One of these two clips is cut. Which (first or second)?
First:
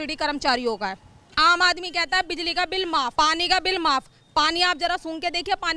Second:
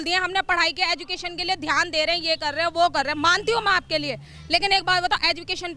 first